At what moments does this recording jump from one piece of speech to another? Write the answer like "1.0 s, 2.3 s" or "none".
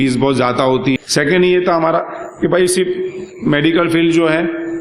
1.0 s